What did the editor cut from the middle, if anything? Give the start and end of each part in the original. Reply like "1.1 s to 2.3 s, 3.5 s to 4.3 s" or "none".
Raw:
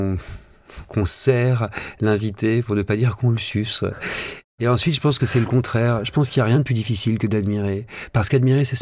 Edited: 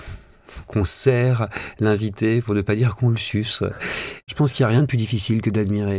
4.5 s to 6.1 s